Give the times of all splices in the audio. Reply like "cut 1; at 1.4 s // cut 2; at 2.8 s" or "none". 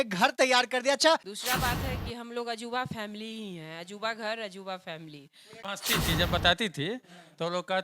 cut 1; at 1.3 s // cut 2; at 5.6 s